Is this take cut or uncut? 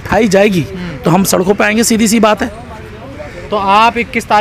uncut